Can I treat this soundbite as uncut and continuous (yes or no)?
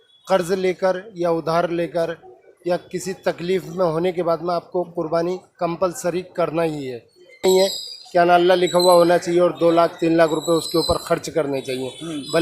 no